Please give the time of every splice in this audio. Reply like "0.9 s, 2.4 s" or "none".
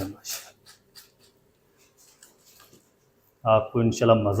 none